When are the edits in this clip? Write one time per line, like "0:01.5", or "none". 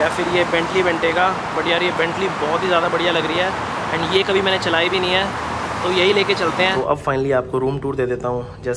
0:06.7